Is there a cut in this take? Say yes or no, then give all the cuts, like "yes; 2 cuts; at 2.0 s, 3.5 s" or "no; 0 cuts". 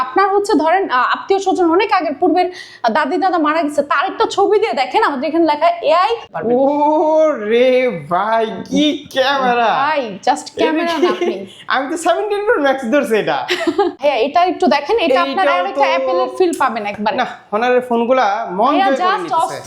yes; 2 cuts; at 6.3 s, 14.0 s